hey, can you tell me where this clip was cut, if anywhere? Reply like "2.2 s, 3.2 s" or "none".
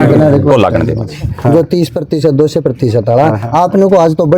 1.4 s